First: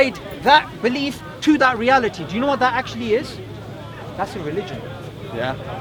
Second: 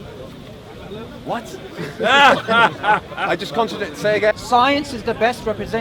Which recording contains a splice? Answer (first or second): second